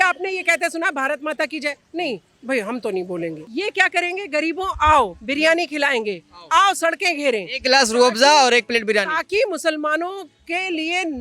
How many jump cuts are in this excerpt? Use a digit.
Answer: 1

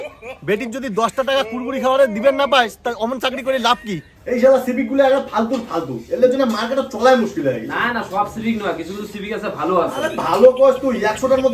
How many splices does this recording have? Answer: 1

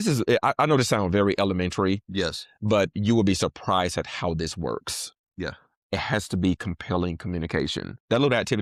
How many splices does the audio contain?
0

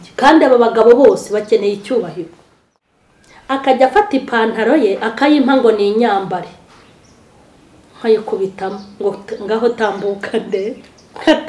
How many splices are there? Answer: 1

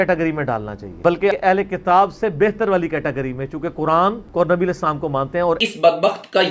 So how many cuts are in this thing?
2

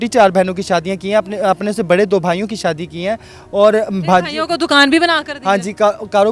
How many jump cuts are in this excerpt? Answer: 0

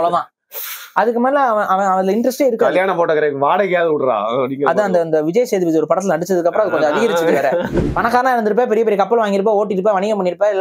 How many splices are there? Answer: 1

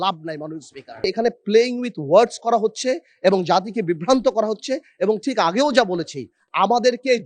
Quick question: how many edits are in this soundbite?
1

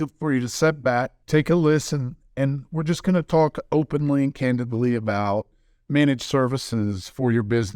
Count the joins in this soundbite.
1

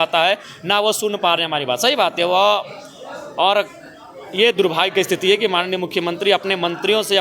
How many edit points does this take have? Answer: 0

